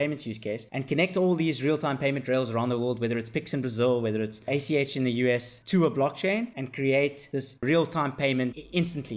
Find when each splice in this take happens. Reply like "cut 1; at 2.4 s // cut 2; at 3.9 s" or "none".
cut 1; at 5.5 s // cut 2; at 6.6 s // cut 3; at 7.3 s